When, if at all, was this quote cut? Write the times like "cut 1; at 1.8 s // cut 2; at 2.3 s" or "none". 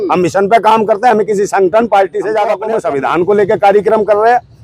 cut 1; at 2.6 s